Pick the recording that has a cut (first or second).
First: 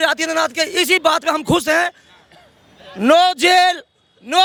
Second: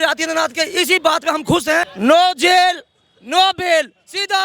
second